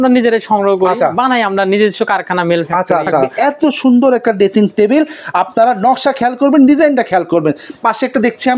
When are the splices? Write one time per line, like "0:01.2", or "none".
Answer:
0:03.3